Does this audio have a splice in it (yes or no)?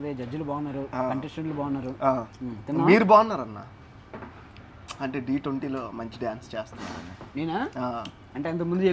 no